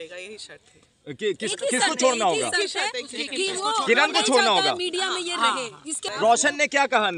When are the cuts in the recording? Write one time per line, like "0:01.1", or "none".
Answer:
0:06.0